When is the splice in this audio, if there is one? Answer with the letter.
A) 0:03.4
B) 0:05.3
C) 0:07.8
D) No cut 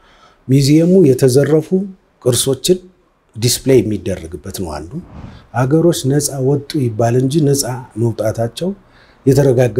B